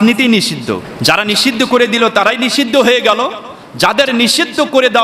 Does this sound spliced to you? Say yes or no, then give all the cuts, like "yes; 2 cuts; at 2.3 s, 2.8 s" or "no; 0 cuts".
yes; 1 cut; at 0.9 s